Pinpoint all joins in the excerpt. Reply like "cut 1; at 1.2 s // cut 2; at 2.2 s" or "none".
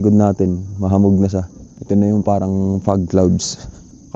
none